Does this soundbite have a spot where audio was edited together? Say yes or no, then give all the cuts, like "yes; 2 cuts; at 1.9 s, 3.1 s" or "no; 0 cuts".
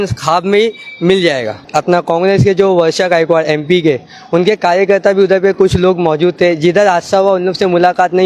yes; 1 cut; at 1.6 s